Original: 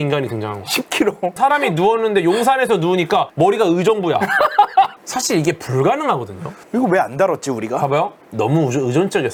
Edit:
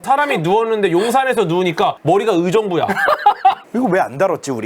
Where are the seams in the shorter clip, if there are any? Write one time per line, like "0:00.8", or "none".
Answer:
0:03.6